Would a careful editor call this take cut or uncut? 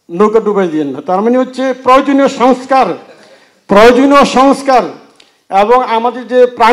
uncut